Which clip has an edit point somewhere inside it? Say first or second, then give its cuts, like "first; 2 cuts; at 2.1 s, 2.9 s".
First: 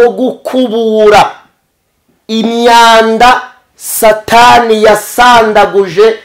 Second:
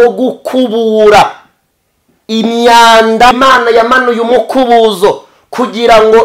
second; 1 cut; at 3.3 s